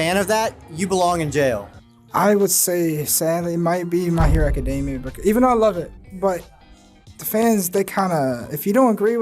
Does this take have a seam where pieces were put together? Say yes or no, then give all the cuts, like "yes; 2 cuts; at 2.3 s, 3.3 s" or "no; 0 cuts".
no; 0 cuts